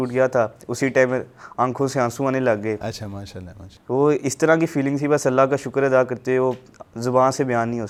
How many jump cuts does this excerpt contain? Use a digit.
0